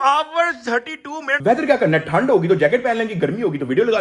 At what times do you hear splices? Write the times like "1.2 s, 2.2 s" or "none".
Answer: 1.3 s